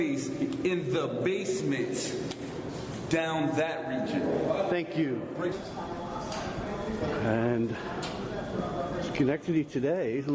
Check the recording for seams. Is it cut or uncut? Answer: cut